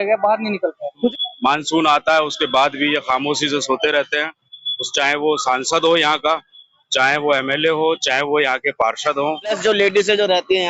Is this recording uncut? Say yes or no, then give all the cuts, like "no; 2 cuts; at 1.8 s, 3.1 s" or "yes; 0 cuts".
no; 2 cuts; at 1.1 s, 9.6 s